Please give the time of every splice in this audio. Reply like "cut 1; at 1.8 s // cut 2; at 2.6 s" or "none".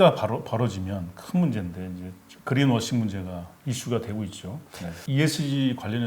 cut 1; at 5.0 s